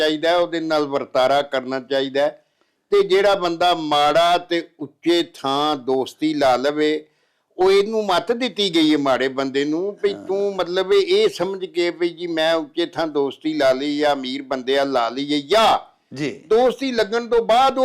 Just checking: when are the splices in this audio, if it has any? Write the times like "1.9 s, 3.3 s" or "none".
none